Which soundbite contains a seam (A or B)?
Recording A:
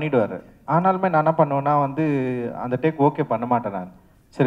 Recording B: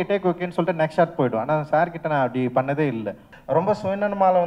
B